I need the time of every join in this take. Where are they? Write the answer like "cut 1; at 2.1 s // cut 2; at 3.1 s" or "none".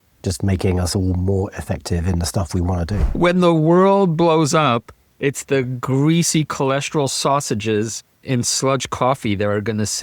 cut 1; at 3.1 s // cut 2; at 8.2 s